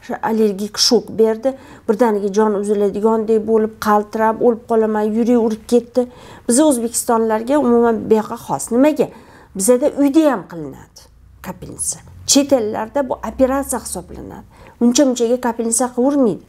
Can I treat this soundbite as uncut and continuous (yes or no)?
yes